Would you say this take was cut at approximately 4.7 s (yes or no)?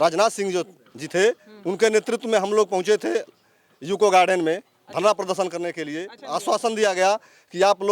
no